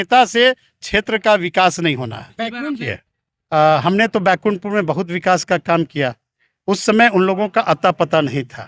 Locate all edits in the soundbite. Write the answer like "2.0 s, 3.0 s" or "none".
2.9 s